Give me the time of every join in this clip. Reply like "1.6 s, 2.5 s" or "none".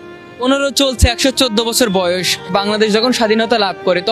none